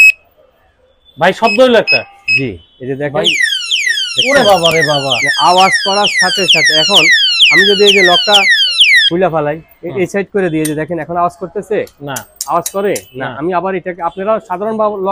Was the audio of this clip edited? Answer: no; 0 cuts

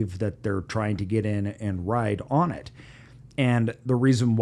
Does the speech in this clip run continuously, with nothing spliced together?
yes; 0 cuts

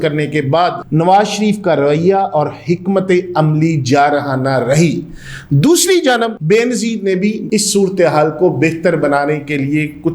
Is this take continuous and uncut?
no; 3 cuts; at 0.8 s, 6.4 s, 7.4 s

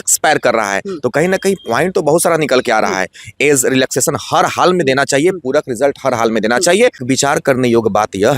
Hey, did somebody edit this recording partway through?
yes; 1 cut; at 7.0 s

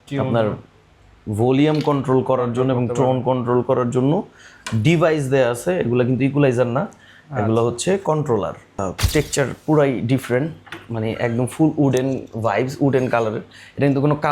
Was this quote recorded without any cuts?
no; 1 cut; at 8.8 s

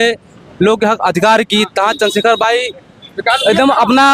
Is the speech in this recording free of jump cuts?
yes; 0 cuts

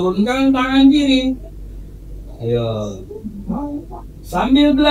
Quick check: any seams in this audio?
no; 0 cuts

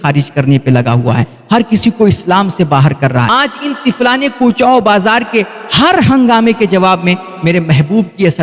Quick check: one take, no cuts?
no; 1 cut; at 3.3 s

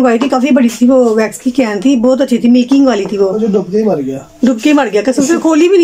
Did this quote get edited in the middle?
no; 0 cuts

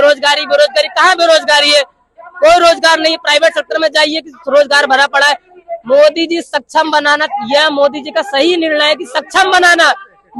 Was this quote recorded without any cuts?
yes; 0 cuts

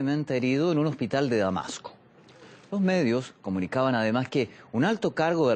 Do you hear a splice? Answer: no; 0 cuts

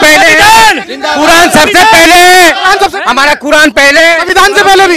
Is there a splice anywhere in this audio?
no; 0 cuts

